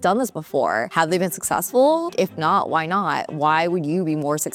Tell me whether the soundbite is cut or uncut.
uncut